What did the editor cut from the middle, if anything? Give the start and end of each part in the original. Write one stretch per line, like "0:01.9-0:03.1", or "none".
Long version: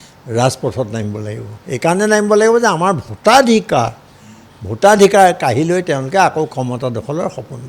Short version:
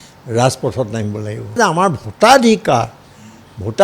0:01.6-0:02.6